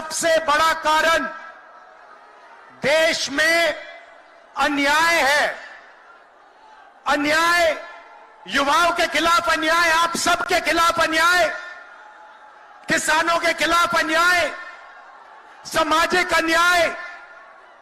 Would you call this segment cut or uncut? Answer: uncut